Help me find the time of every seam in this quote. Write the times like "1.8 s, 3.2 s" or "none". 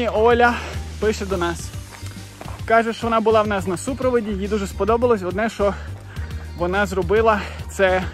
none